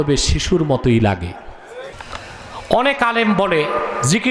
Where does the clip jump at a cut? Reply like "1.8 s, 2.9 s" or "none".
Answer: 1.8 s